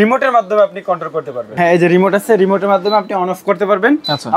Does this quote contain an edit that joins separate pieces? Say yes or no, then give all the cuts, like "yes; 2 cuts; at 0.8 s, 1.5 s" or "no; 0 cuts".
yes; 1 cut; at 1.4 s